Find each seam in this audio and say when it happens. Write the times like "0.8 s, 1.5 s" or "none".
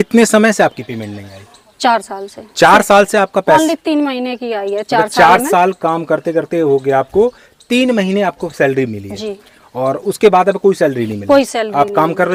none